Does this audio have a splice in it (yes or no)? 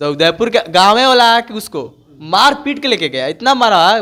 no